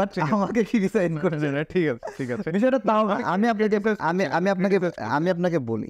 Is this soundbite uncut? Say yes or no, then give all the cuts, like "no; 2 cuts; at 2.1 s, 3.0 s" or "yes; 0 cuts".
yes; 0 cuts